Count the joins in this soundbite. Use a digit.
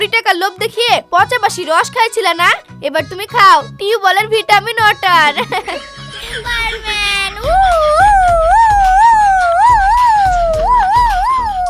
1